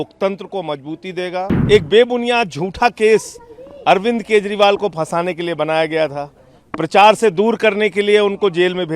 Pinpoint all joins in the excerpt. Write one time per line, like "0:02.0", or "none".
0:01.5